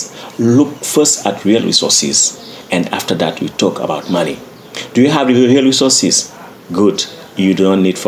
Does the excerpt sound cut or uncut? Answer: uncut